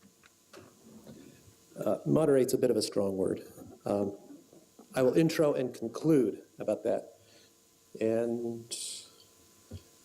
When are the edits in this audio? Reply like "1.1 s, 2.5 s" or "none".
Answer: 2.6 s